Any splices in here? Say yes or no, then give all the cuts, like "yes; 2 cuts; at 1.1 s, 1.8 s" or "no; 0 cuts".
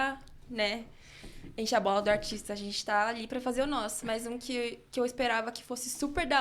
no; 0 cuts